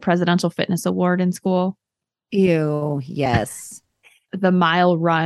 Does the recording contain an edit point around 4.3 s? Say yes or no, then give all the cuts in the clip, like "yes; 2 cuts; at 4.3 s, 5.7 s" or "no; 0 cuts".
yes; 1 cut; at 4.3 s